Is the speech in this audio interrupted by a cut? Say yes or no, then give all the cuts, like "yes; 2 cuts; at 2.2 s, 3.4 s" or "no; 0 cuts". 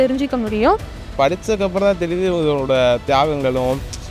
yes; 1 cut; at 1.1 s